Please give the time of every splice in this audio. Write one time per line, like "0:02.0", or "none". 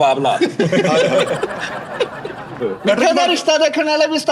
0:02.6